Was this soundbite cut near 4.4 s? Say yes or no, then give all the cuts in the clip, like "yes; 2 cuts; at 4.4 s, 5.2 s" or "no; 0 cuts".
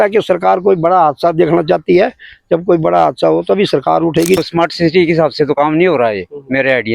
yes; 1 cut; at 4.4 s